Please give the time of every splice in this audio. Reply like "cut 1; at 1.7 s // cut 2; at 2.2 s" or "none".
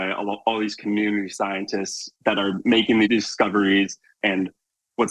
cut 1; at 2.2 s // cut 2; at 3.1 s // cut 3; at 4.2 s